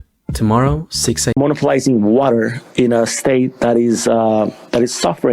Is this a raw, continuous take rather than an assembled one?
no; 1 cut; at 1.3 s

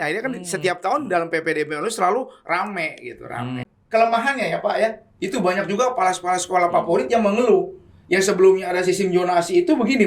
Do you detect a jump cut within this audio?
yes; 1 cut; at 3.7 s

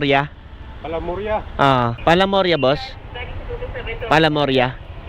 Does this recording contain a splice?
yes; 1 cut; at 2.0 s

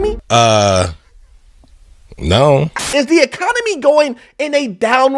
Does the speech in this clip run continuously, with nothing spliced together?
yes; 0 cuts

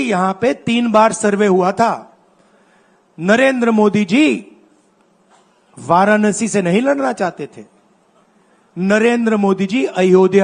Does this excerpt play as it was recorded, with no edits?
yes; 0 cuts

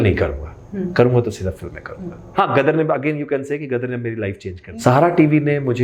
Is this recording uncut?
no; 2 cuts; at 2.3 s, 4.6 s

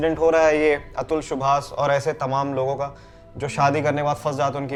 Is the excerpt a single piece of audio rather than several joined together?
yes; 0 cuts

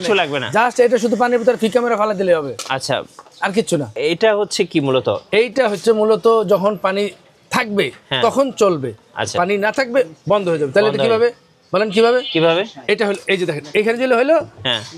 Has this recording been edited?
yes; 1 cut; at 4.0 s

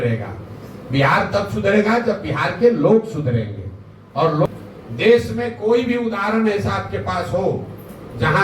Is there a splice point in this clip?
yes; 1 cut; at 4.4 s

